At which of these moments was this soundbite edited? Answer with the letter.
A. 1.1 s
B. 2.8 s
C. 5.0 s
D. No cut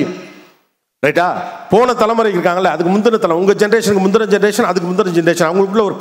D